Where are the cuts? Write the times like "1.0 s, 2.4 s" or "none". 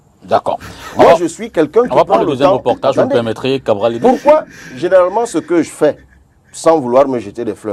none